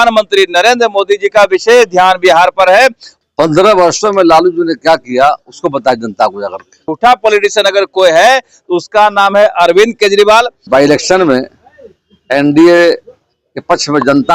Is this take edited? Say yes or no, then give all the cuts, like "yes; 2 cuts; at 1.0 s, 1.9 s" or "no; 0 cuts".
yes; 3 cuts; at 3.1 s, 6.9 s, 10.6 s